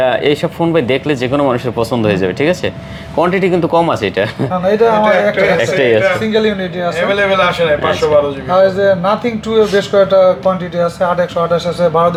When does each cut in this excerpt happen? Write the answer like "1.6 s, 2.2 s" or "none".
none